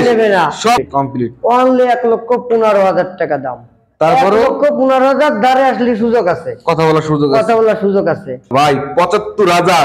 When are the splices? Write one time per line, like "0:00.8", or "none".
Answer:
0:00.8
0:08.5